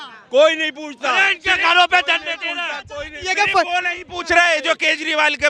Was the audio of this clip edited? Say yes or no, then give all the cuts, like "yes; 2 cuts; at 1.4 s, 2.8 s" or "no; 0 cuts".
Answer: no; 0 cuts